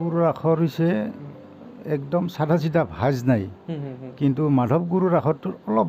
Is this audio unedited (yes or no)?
yes